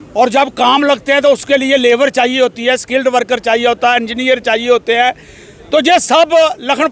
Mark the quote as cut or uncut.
uncut